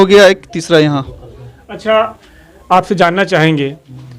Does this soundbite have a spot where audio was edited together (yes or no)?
no